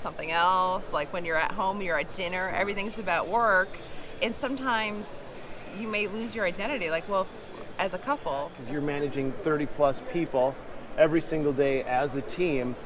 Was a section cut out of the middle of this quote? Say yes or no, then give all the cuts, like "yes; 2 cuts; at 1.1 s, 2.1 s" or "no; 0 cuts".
yes; 1 cut; at 8.6 s